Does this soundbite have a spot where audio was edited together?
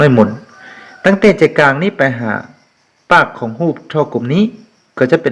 no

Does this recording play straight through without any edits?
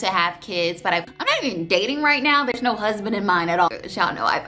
no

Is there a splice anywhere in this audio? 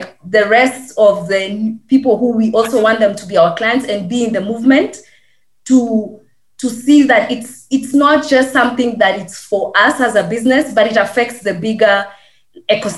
no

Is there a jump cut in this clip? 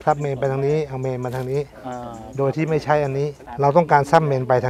yes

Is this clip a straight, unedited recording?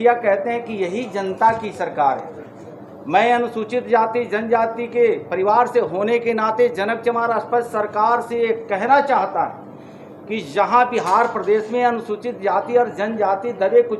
yes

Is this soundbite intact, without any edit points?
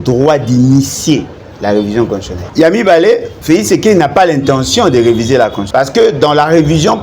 no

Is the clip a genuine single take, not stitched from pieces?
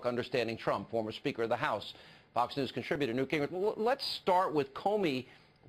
yes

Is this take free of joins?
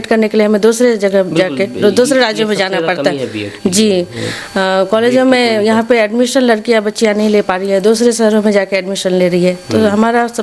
yes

